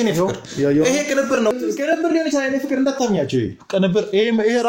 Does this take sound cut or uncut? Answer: cut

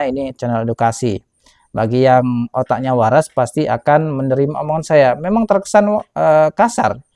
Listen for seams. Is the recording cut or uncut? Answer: uncut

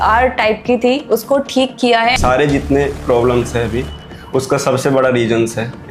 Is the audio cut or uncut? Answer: cut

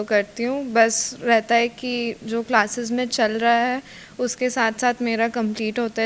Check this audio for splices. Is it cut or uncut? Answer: uncut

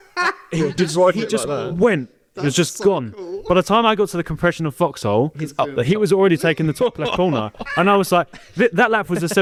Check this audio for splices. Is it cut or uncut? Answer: uncut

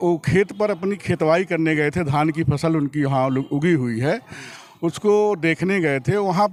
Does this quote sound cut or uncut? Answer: uncut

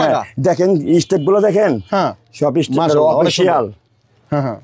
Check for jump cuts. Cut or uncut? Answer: uncut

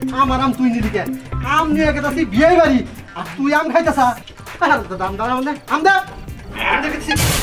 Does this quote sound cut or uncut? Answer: uncut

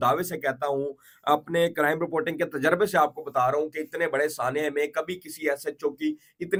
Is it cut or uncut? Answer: uncut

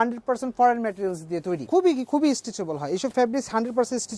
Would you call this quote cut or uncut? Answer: cut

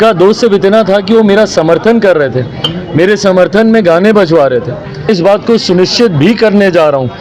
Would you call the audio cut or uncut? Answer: cut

